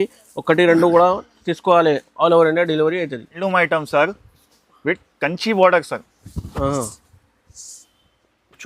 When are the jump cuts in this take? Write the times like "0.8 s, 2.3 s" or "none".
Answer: 3.4 s